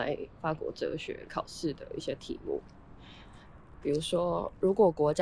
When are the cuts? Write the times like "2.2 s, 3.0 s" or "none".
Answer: none